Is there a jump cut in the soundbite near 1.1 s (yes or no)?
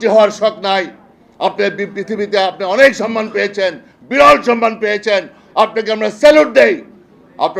no